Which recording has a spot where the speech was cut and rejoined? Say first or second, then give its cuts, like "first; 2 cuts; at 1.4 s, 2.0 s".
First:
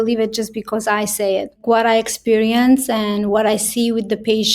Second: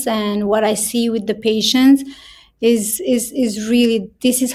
first; 1 cut; at 1.6 s